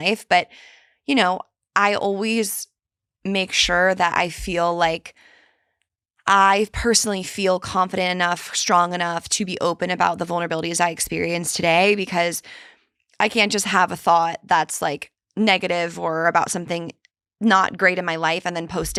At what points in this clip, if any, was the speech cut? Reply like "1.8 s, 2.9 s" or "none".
none